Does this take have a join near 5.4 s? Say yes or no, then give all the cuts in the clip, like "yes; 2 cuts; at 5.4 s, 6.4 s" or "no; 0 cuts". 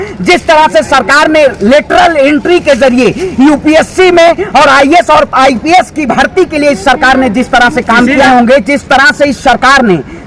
no; 1 cut; at 8.2 s